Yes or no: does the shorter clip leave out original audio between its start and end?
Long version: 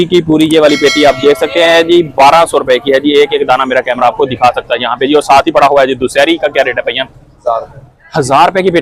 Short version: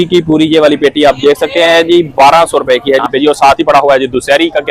yes